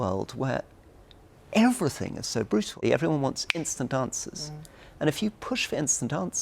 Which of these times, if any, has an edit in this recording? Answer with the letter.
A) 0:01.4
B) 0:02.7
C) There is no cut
B